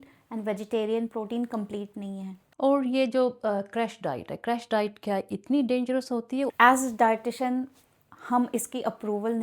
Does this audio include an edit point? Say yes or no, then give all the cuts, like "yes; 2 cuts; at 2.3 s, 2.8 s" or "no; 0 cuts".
yes; 2 cuts; at 2.4 s, 6.5 s